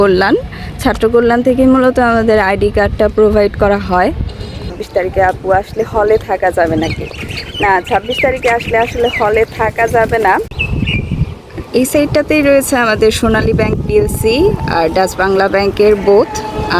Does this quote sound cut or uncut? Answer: cut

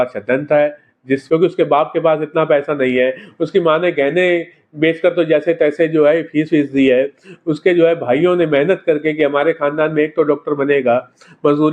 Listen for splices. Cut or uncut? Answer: cut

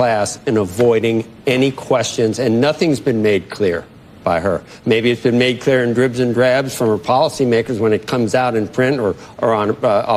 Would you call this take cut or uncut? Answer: uncut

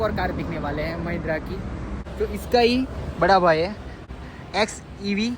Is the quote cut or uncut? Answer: cut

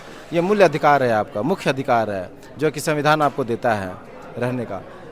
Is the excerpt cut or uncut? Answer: uncut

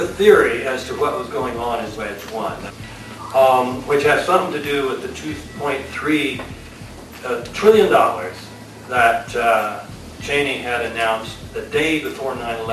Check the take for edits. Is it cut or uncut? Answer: cut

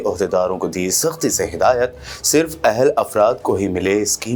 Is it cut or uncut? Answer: uncut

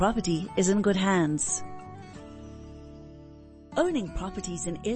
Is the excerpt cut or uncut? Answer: cut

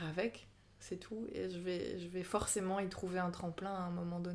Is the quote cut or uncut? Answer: uncut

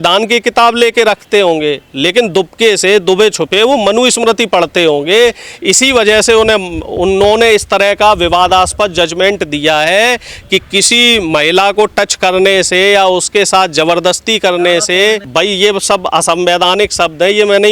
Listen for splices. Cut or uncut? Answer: uncut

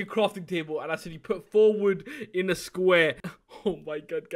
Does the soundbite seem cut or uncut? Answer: cut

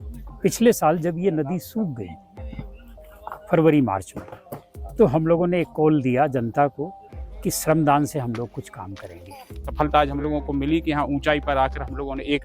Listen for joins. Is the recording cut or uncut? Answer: cut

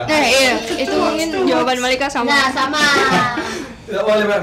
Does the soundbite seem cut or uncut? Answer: uncut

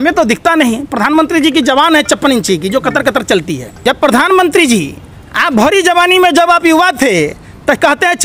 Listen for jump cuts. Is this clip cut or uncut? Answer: cut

